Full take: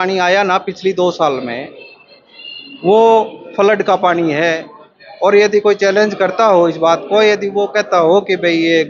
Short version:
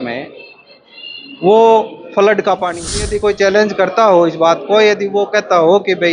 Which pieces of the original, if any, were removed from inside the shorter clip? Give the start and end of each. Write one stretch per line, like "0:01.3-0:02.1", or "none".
0:04.4-0:05.4